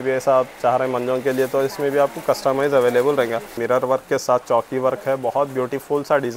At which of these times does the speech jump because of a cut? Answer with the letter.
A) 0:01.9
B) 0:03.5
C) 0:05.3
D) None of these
B